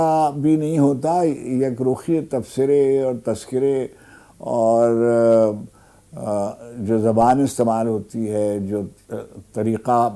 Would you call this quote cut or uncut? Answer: uncut